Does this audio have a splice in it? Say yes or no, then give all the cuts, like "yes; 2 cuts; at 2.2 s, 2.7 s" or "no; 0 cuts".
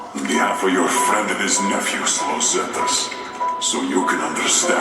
no; 0 cuts